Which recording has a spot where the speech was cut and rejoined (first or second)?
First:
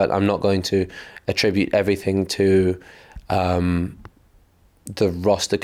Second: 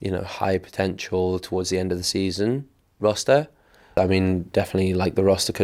second